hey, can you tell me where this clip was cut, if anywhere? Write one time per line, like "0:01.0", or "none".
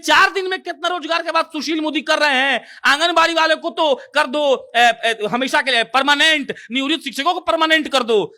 none